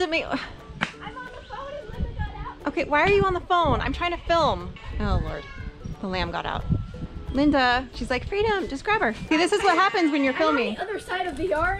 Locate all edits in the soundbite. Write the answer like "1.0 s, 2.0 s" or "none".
4.8 s, 7.1 s, 7.9 s, 9.2 s